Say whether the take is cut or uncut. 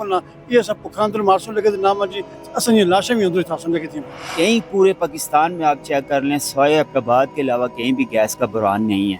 cut